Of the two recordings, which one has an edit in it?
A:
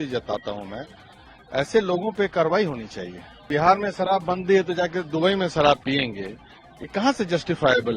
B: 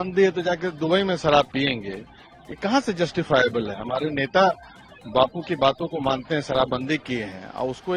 A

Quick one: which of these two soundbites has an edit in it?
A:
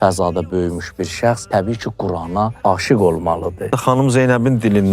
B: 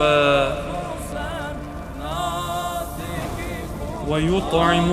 A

